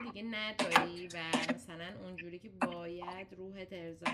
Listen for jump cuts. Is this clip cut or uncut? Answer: uncut